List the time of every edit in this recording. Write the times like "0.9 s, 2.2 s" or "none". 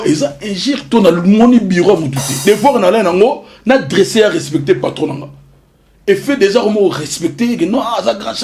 2.4 s